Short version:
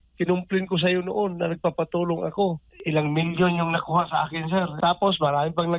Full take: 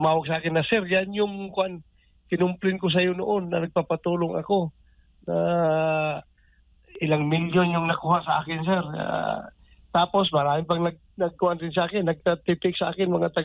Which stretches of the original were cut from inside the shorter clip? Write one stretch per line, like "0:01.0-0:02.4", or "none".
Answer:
0:04.8-0:06.9
0:08.9-0:09.8